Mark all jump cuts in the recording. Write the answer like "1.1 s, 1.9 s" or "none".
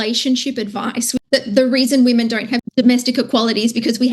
1.2 s, 2.6 s